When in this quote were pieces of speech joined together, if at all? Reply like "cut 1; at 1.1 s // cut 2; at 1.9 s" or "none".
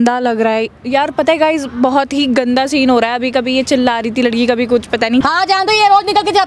cut 1; at 5.2 s

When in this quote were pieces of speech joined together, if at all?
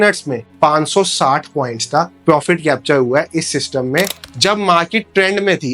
cut 1; at 4.2 s

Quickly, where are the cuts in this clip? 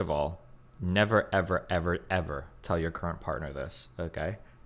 none

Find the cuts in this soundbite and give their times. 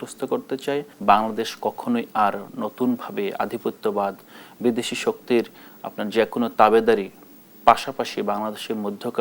cut 1; at 0.9 s

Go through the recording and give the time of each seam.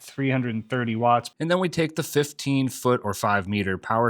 cut 1; at 1.3 s

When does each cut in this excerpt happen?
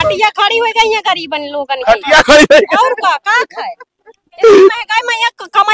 none

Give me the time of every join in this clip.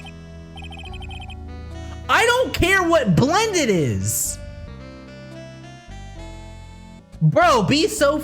cut 1; at 4.7 s // cut 2; at 7.0 s

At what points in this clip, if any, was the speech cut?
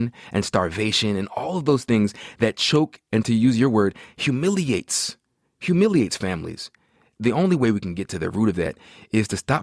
cut 1; at 3.2 s // cut 2; at 7.1 s

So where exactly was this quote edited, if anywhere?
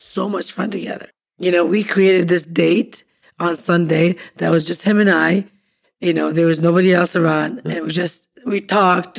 cut 1; at 1.0 s

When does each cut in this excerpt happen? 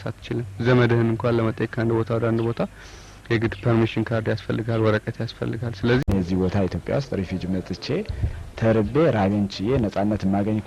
cut 1; at 6.0 s

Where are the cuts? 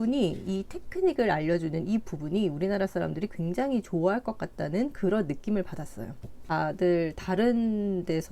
cut 1; at 6.4 s

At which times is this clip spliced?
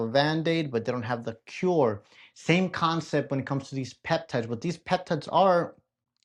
none

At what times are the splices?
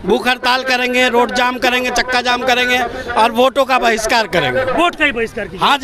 none

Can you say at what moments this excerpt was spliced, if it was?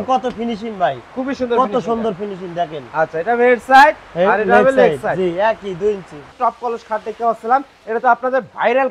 cut 1; at 6.2 s

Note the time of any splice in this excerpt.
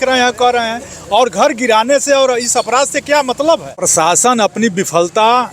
cut 1; at 3.9 s

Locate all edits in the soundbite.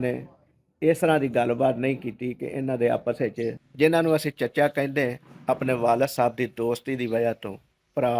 cut 1; at 3.6 s

